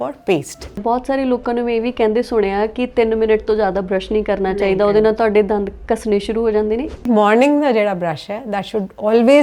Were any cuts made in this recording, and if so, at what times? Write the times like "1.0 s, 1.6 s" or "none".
0.8 s, 7.1 s